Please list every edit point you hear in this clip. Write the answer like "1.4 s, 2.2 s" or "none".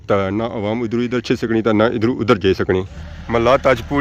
2.9 s